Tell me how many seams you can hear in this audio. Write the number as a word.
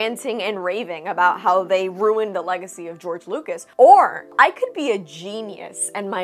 two